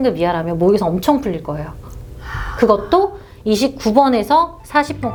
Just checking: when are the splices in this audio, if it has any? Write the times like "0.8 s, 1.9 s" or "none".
none